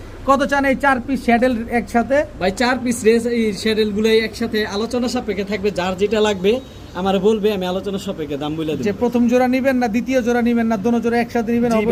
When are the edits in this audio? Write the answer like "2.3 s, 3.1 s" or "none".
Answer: none